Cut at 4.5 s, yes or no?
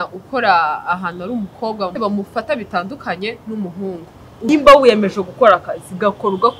yes